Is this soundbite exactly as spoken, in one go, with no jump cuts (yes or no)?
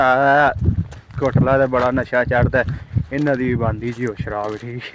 yes